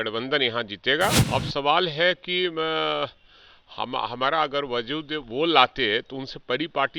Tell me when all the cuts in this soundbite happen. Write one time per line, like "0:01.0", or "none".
0:01.2